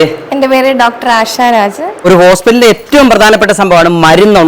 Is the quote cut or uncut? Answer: cut